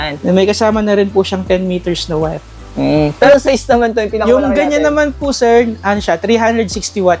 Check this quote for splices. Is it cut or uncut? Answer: cut